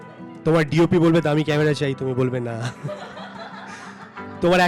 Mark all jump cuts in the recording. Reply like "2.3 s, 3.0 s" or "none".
none